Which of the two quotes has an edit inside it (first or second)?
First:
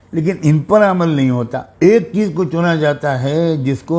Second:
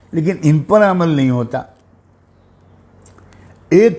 first